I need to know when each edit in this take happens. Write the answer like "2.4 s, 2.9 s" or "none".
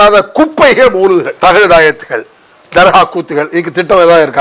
none